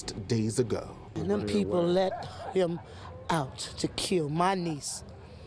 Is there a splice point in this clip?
yes; 1 cut; at 1.0 s

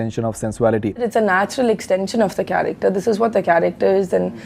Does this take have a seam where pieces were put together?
yes; 1 cut; at 1.0 s

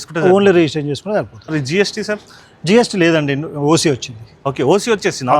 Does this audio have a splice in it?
yes; 1 cut; at 1.5 s

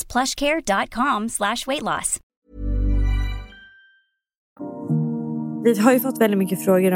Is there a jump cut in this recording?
no; 0 cuts

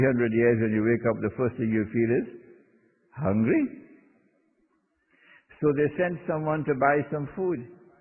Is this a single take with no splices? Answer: yes; 0 cuts

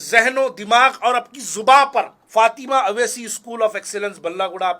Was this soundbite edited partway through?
yes; 1 cut; at 2.1 s

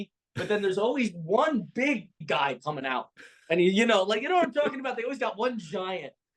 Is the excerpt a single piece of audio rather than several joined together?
no; 1 cut; at 2.2 s

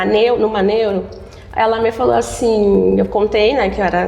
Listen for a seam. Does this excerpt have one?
no; 0 cuts

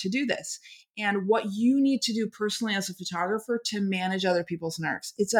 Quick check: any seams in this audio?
no; 0 cuts

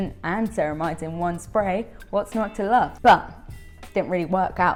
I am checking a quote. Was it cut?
no; 0 cuts

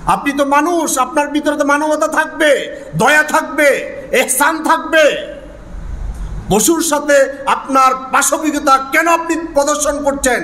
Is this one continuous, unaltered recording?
yes; 0 cuts

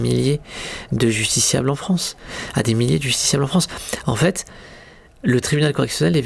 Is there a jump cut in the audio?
no; 0 cuts

